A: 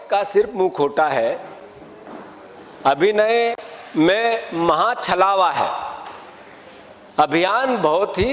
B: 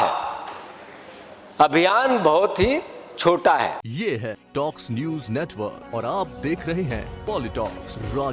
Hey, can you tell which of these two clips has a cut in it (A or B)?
B